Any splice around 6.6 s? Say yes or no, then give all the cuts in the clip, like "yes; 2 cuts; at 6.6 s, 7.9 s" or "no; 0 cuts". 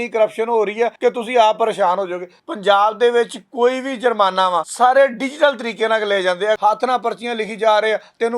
yes; 4 cuts; at 0.9 s, 2.3 s, 4.7 s, 6.6 s